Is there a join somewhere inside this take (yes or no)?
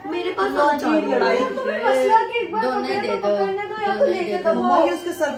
no